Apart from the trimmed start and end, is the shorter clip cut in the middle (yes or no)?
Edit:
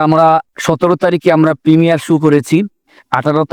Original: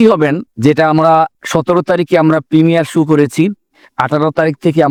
no